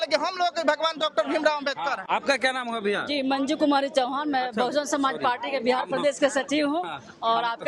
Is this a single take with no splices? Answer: yes; 0 cuts

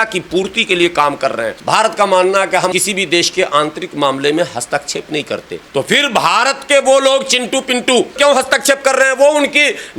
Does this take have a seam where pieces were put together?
yes; 4 cuts; at 1.5 s, 2.7 s, 5.6 s, 8.1 s

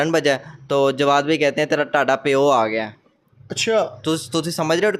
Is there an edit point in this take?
no; 0 cuts

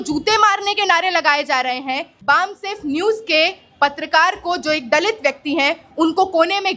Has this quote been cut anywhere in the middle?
yes; 1 cut; at 2.1 s

